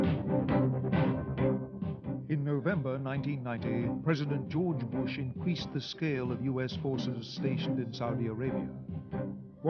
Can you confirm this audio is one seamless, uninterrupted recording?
yes; 0 cuts

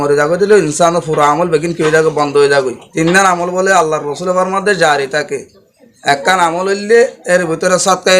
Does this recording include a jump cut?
yes; 1 cut; at 2.8 s

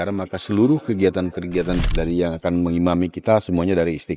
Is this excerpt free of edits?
no; 1 cut; at 1.8 s

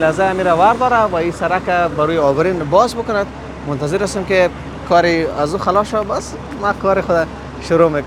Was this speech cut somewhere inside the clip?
no; 0 cuts

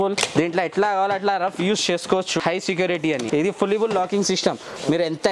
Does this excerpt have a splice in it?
yes; 2 cuts; at 2.4 s, 3.3 s

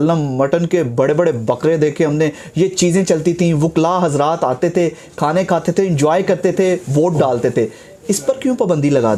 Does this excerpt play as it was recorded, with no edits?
yes; 0 cuts

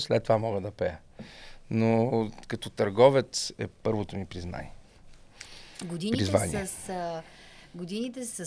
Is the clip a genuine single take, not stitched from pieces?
yes; 0 cuts

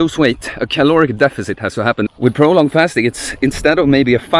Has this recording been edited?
yes; 1 cut; at 2.1 s

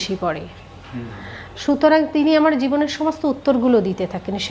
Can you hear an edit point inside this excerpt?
no; 0 cuts

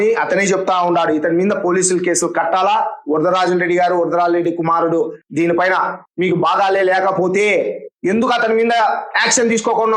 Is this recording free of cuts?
yes; 0 cuts

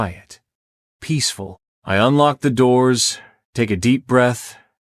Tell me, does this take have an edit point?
yes; 1 cut; at 1.7 s

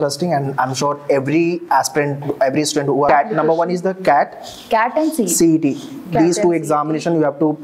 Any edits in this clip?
yes; 1 cut; at 3.1 s

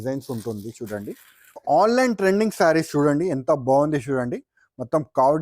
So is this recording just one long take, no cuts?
no; 1 cut; at 1.6 s

